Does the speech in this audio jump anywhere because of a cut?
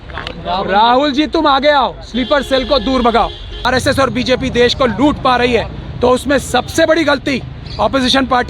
yes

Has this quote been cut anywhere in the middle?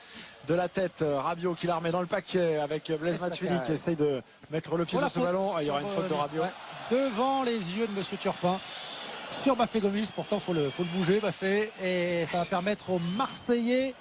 no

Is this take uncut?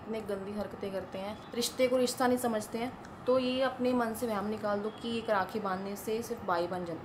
yes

